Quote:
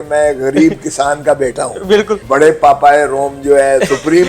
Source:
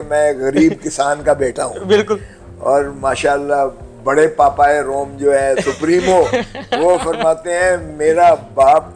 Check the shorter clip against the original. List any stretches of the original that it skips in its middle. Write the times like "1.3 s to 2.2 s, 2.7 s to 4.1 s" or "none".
2.2 s to 3.9 s